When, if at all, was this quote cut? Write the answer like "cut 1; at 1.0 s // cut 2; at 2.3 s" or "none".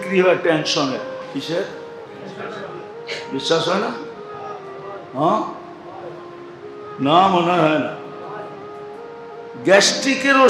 cut 1; at 1.2 s